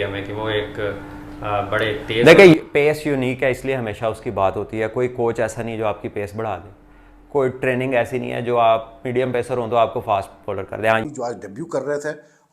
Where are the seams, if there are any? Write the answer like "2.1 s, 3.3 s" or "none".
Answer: 11.1 s

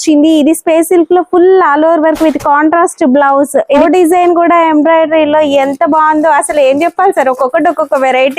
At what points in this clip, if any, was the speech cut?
3.8 s

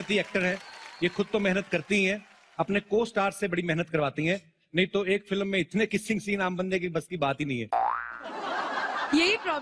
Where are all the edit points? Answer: none

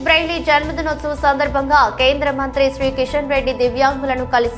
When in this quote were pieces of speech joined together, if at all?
none

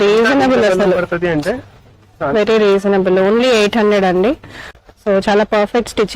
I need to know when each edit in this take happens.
4.8 s

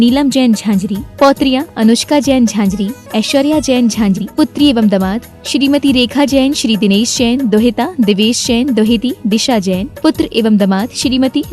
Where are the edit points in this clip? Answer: 4.2 s

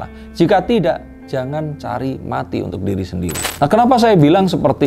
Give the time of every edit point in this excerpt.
3.5 s

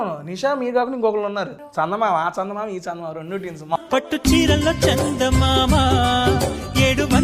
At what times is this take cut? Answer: 1.6 s, 3.8 s

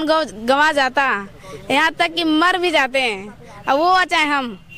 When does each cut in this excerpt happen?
none

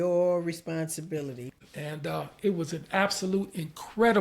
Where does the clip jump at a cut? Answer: 1.5 s

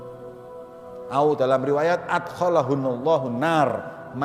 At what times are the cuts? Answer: 1.1 s

